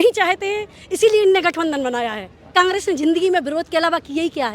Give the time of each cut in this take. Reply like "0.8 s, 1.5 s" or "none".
2.5 s